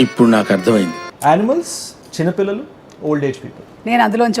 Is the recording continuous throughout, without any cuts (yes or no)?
no